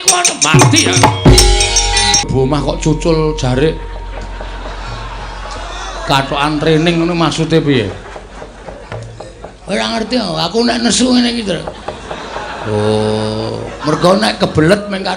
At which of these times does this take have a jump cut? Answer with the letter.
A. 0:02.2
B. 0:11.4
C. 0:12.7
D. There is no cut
A